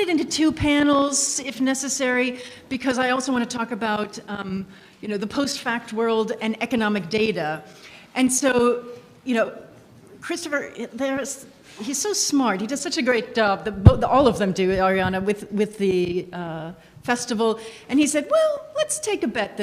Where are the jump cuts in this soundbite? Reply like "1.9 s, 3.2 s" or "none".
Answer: none

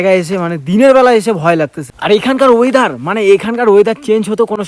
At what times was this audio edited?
1.9 s

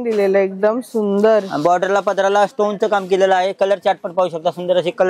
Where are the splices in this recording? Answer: none

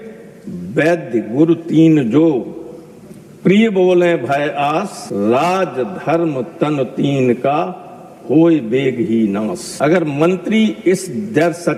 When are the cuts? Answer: none

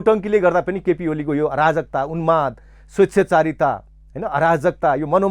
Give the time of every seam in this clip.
none

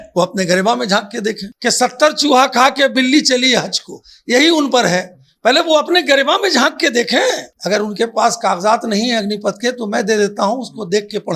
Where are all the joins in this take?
1.5 s, 7.5 s

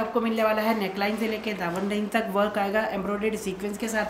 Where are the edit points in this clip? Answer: none

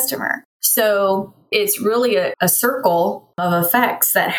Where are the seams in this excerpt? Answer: 3.4 s

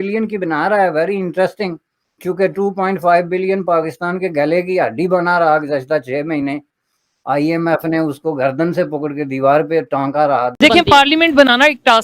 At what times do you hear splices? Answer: 10.6 s

